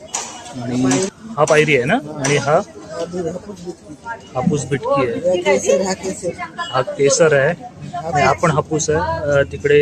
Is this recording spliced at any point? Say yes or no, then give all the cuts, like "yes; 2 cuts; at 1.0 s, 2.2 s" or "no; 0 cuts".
yes; 1 cut; at 1.1 s